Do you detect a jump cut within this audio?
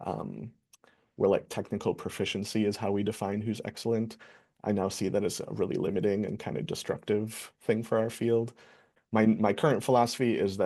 yes; 1 cut; at 8.9 s

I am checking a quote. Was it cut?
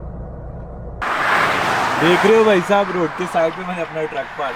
yes; 1 cut; at 1.0 s

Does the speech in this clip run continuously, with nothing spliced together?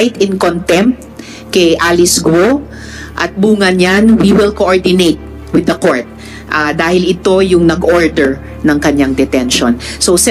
yes; 0 cuts

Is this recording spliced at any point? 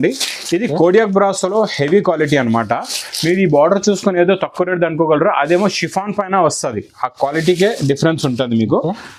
no; 0 cuts

